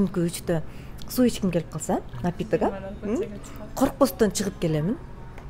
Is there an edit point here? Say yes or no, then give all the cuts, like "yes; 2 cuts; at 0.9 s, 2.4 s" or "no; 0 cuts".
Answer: no; 0 cuts